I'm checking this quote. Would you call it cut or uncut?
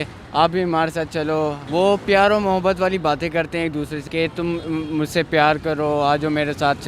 cut